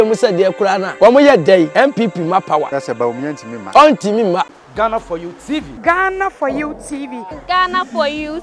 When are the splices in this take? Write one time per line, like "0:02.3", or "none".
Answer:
0:00.9
0:01.7
0:03.2
0:04.5